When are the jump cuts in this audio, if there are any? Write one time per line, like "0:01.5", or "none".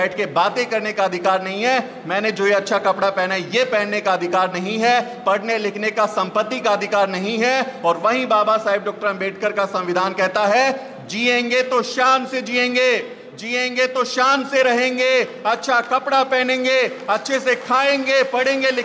none